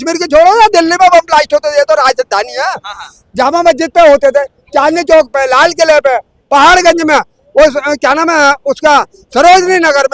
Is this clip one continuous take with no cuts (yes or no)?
yes